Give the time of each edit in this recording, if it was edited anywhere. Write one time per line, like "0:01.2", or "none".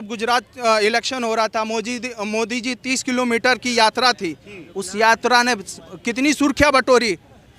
none